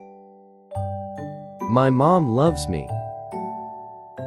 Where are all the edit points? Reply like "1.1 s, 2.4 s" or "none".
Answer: none

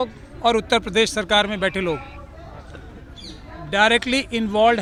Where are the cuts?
none

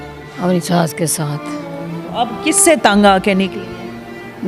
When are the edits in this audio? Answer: none

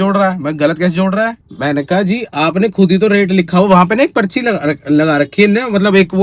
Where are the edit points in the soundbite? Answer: none

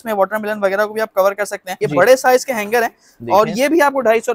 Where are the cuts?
1.6 s

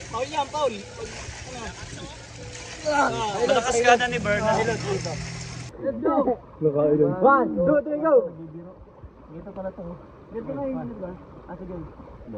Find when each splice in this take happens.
5.7 s

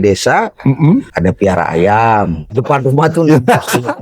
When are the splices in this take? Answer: 1.1 s, 2.6 s

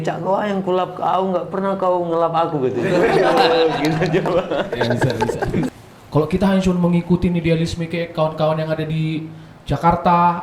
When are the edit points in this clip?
5.7 s

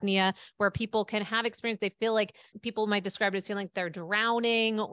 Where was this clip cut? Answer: 2.5 s

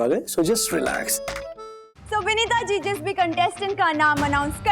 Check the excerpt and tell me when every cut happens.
1.9 s

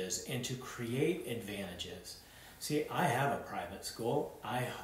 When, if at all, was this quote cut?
none

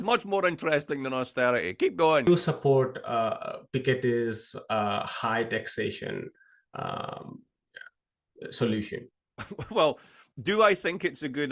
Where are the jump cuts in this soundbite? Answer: 2.3 s

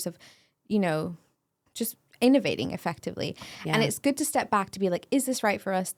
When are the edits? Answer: none

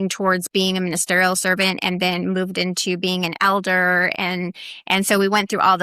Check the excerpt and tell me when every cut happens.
none

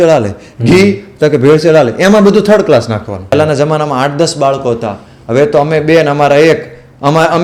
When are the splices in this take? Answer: 3.3 s

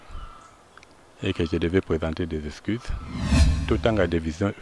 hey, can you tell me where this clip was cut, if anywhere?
3.5 s

